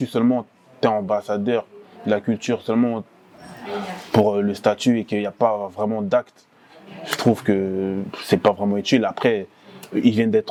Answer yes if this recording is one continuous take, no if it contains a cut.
yes